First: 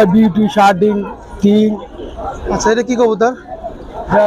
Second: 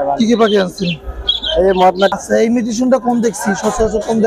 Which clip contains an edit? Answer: second; 1 cut; at 2.1 s

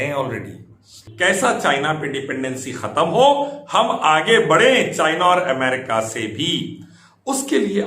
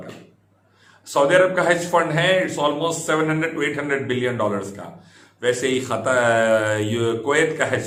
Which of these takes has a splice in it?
first; 1 cut; at 1.0 s

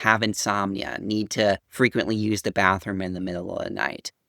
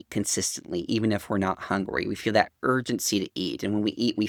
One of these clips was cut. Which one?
first; 1 cut; at 1.7 s

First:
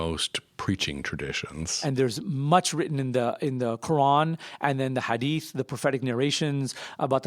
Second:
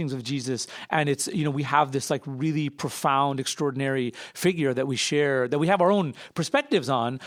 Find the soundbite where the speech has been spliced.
first; 1 cut; at 1.8 s

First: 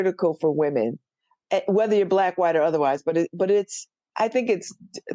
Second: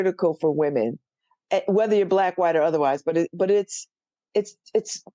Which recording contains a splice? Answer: first; 1 cut; at 4.0 s

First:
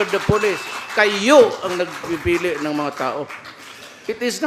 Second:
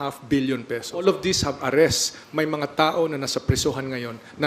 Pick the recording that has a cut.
second; 1 cut; at 1.0 s

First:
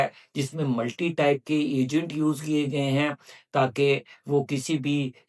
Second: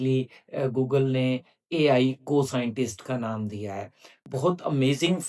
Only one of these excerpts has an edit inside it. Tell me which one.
second; 1 cut; at 4.1 s

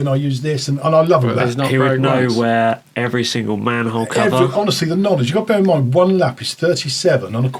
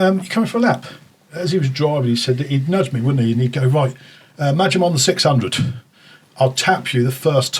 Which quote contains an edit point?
second; 1 cut; at 1.3 s

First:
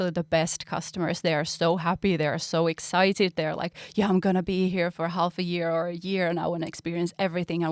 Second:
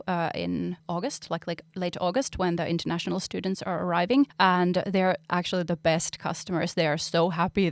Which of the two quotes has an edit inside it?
second; 2 cuts; at 0.8 s, 4.3 s

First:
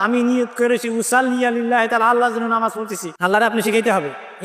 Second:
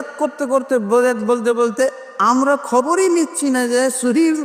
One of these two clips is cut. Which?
first; 1 cut; at 3.0 s

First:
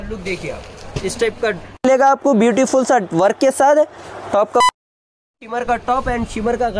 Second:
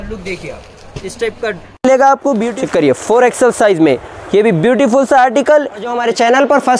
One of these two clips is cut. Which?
second; 2 cuts; at 2.5 s, 6.0 s

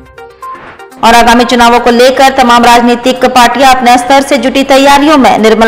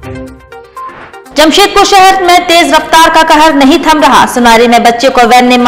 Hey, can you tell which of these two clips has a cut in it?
second; 1 cut; at 0.9 s

